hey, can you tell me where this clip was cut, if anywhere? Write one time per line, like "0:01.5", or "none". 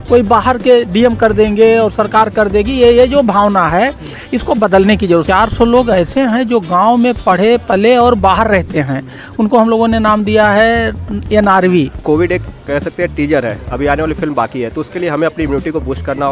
0:05.2
0:12.0